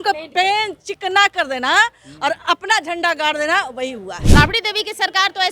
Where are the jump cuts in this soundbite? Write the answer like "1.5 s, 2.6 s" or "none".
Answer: 4.2 s